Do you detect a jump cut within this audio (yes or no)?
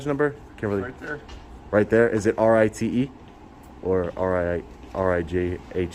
no